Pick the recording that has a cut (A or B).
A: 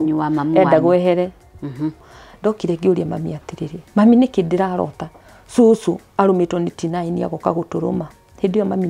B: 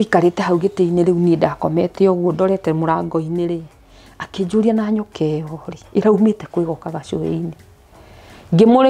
A